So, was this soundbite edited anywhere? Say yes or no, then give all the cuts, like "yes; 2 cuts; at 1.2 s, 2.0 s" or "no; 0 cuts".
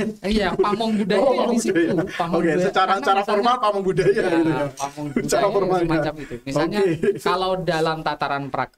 no; 0 cuts